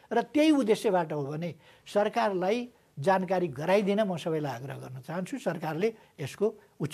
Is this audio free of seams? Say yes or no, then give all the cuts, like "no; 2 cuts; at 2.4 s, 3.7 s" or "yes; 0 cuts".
yes; 0 cuts